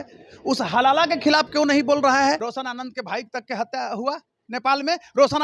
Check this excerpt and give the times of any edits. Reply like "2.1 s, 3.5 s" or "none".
2.5 s